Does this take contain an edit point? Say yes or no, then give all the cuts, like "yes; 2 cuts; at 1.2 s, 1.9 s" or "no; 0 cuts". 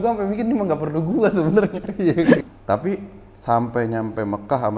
yes; 1 cut; at 2.4 s